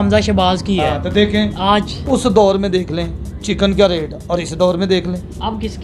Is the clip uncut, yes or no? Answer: yes